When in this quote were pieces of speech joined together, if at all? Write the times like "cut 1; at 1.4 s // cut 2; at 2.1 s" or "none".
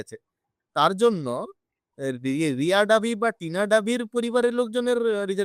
none